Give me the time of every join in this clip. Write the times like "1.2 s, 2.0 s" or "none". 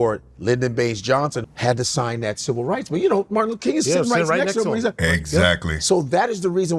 1.4 s